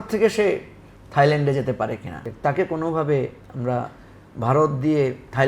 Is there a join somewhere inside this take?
yes; 1 cut; at 2.2 s

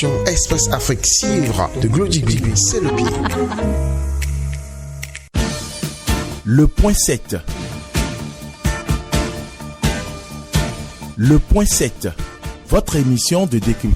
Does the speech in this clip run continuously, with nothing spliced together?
no; 1 cut; at 5.1 s

